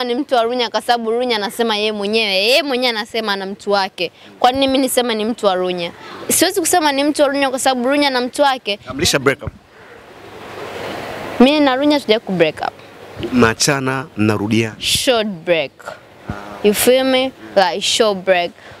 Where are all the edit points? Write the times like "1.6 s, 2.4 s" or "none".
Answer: none